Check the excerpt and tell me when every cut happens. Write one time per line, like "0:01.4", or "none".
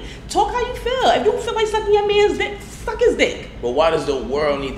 none